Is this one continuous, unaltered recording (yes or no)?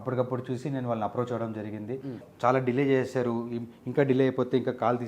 no